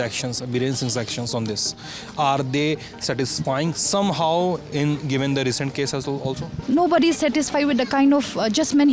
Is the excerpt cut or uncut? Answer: cut